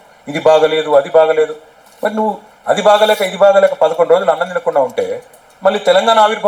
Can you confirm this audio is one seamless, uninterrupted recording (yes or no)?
yes